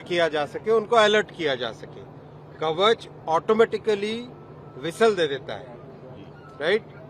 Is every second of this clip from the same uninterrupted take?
yes; 0 cuts

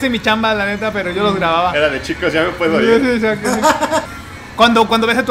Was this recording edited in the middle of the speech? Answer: yes; 1 cut; at 4.1 s

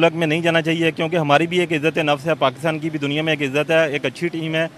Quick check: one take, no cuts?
yes; 0 cuts

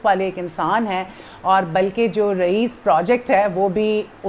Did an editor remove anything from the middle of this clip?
no; 0 cuts

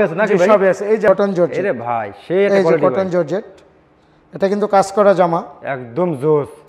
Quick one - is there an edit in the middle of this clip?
yes; 1 cut; at 1.1 s

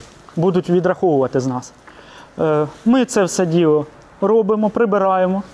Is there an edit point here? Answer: no; 0 cuts

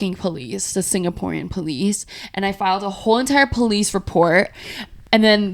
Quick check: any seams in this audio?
no; 0 cuts

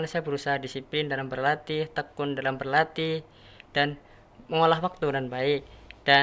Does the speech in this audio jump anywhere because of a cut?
no; 0 cuts

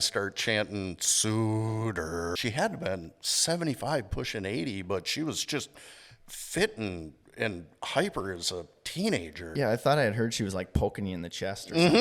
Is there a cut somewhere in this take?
yes; 2 cuts; at 2.4 s, 9.5 s

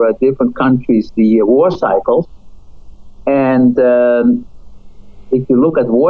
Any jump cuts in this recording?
no; 0 cuts

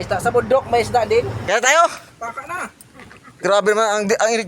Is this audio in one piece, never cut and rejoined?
no; 1 cut; at 1.4 s

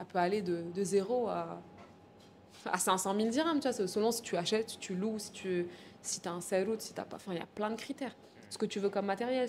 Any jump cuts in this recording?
no; 0 cuts

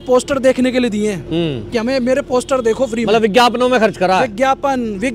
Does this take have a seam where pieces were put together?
yes; 1 cut; at 1.2 s

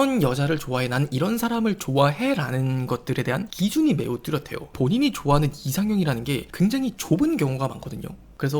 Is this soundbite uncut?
no; 1 cut; at 4.6 s

